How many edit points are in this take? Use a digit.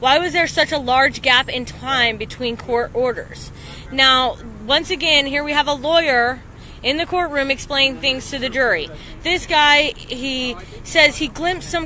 1